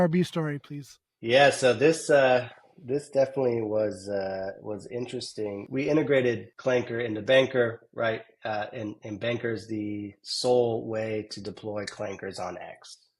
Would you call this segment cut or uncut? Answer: cut